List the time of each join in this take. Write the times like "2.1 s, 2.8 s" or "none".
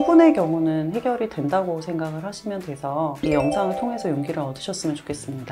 3.1 s